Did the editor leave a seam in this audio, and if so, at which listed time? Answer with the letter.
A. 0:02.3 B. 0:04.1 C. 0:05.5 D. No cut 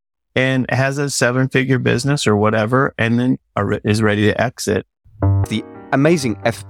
C